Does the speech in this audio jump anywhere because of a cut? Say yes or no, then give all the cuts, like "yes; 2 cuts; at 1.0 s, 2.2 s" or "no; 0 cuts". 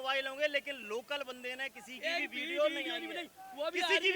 no; 0 cuts